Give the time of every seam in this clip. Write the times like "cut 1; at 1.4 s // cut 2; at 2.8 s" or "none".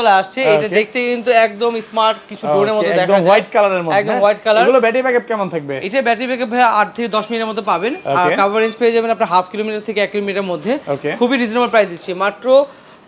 none